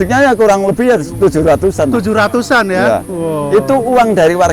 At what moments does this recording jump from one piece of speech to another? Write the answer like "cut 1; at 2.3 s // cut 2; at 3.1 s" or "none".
none